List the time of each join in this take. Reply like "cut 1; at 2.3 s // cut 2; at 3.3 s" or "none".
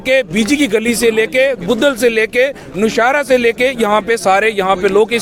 none